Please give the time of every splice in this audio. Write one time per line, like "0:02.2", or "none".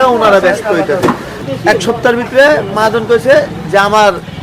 0:01.3